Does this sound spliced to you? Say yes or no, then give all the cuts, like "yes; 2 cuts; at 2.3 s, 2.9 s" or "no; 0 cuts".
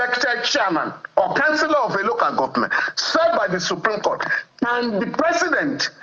no; 0 cuts